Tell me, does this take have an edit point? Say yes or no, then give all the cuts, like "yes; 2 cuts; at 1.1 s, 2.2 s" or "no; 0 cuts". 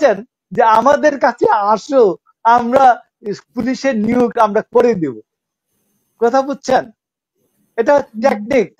no; 0 cuts